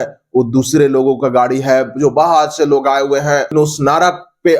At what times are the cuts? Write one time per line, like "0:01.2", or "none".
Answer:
0:03.5